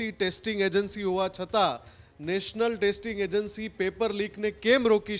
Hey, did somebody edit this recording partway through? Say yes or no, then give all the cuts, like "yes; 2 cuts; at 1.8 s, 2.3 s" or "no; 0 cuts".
no; 0 cuts